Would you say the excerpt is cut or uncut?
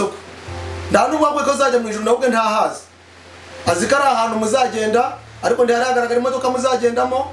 uncut